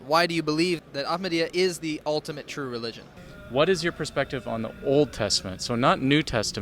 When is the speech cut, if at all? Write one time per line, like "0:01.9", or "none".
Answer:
0:00.8
0:03.4